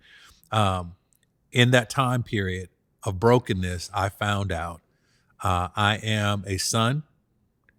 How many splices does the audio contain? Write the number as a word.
zero